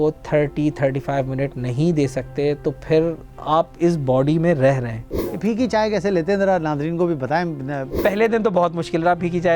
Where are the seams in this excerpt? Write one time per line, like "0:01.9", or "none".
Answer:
0:05.4
0:08.0

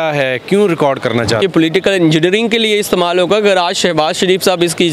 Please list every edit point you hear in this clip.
0:01.4

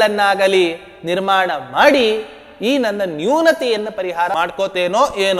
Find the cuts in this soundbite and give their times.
0:04.3

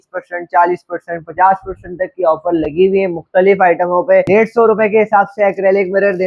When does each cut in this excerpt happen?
0:04.3

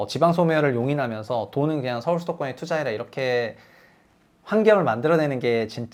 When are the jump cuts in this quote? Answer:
none

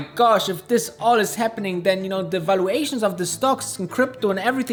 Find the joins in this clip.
none

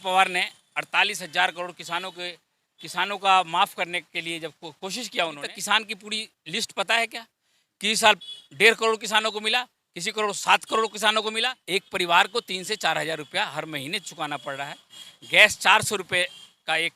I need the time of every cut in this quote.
0:05.5
0:11.4

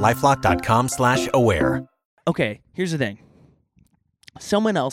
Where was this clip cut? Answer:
0:02.2

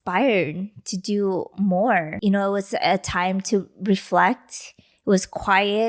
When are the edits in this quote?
0:02.1

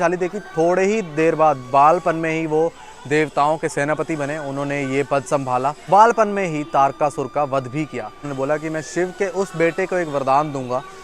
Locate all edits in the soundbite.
0:05.8
0:08.2

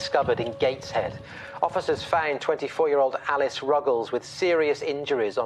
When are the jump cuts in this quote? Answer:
none

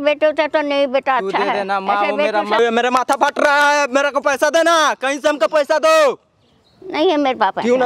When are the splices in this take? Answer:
0:02.6

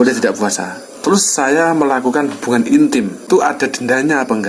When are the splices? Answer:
0:03.3

